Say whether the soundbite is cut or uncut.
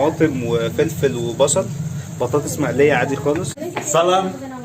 cut